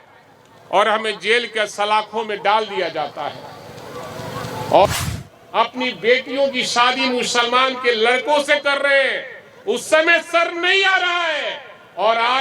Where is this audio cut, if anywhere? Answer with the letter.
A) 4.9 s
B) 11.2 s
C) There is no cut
A